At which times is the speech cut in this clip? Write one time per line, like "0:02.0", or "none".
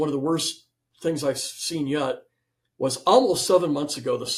none